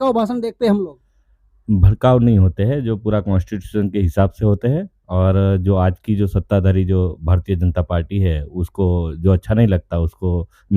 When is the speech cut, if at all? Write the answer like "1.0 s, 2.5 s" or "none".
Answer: none